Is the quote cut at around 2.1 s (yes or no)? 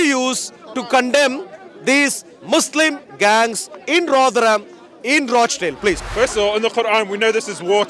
no